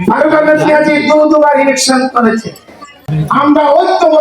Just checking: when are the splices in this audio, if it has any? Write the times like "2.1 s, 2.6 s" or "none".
3.1 s